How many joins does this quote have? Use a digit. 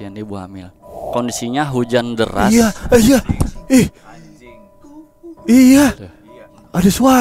1